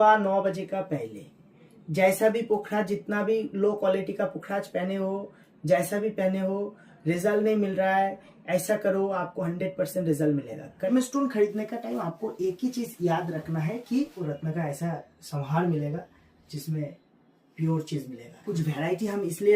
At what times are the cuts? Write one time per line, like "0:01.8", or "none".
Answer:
0:10.9
0:14.2
0:18.5